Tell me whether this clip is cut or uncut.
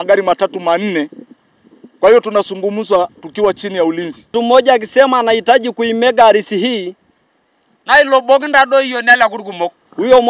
cut